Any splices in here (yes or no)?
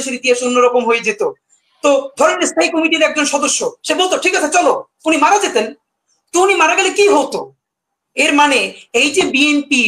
no